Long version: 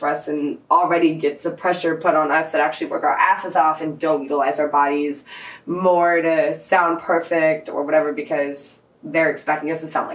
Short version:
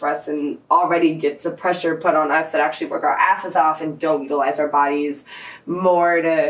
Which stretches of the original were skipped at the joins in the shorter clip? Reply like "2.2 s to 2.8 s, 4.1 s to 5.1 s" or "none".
none